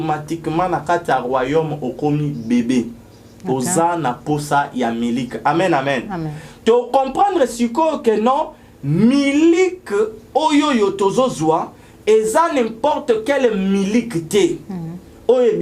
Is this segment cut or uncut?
uncut